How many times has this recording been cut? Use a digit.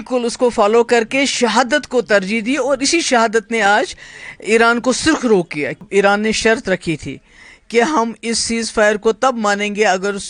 1